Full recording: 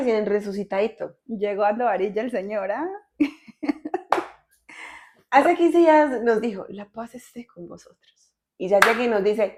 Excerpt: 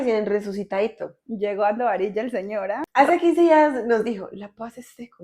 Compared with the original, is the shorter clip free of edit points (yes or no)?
no